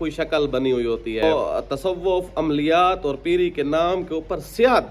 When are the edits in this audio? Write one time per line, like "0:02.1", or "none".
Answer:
0:01.2